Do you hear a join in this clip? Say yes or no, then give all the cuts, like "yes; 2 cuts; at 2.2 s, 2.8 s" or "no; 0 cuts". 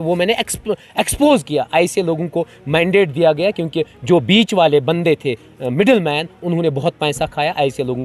no; 0 cuts